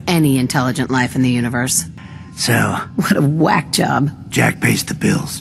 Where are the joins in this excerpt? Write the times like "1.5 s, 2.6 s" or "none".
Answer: 1.9 s, 4.2 s